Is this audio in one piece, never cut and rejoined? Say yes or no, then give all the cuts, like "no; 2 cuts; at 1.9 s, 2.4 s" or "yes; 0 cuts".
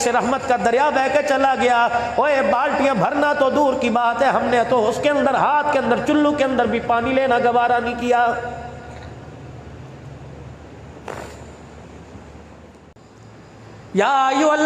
no; 1 cut; at 13.0 s